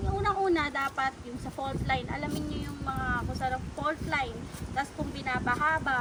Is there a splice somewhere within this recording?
no; 0 cuts

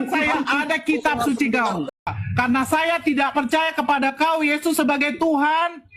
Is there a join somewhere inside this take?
yes; 1 cut; at 1.8 s

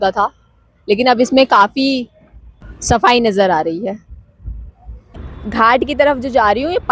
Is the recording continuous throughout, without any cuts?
no; 2 cuts; at 3.0 s, 5.3 s

